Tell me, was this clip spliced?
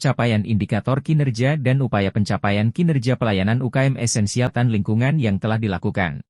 yes; 1 cut; at 4.5 s

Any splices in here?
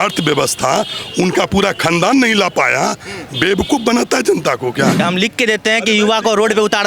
yes; 1 cut; at 5.0 s

